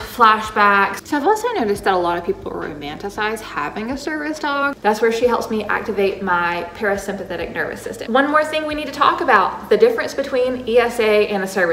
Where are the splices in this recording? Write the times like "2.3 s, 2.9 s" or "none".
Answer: 1.0 s, 4.8 s, 7.9 s